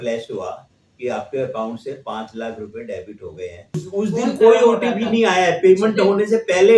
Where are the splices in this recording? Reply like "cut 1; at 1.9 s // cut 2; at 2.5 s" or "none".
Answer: cut 1; at 3.7 s